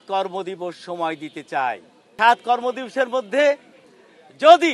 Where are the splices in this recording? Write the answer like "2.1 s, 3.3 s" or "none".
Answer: 2.1 s